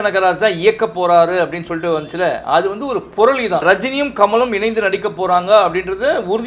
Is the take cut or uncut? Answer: cut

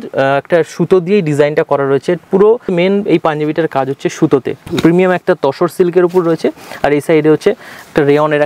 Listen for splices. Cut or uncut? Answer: cut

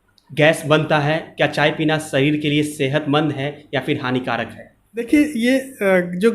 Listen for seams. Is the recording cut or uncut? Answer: cut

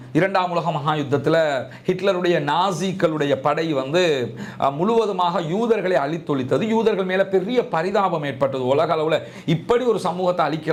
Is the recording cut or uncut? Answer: uncut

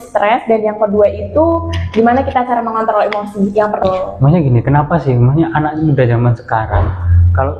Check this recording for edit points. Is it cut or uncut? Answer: cut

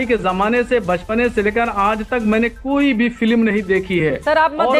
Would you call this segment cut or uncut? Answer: uncut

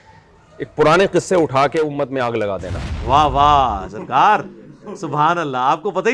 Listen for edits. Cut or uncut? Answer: cut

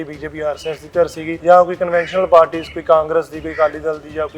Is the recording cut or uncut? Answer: cut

